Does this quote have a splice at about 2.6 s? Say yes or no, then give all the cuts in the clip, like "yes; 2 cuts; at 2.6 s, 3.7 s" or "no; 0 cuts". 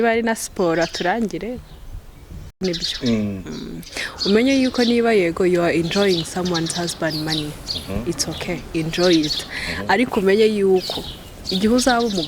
yes; 1 cut; at 2.6 s